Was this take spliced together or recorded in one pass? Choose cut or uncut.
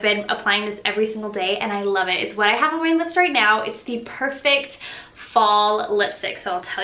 uncut